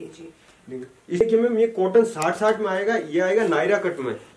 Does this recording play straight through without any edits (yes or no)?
no